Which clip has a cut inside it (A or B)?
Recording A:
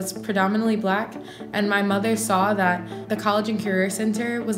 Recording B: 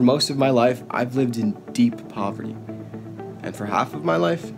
A